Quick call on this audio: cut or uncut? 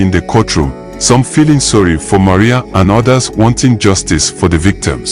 uncut